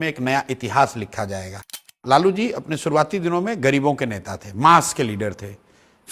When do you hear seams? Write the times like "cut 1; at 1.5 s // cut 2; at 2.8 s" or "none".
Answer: cut 1; at 1.8 s